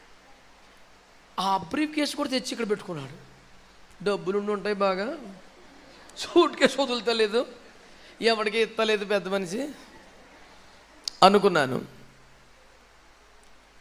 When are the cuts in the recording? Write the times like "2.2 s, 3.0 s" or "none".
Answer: none